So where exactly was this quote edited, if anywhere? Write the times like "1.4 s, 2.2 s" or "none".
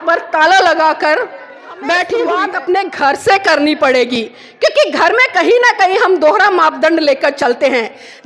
2.5 s